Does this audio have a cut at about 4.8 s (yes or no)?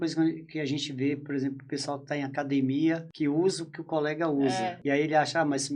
yes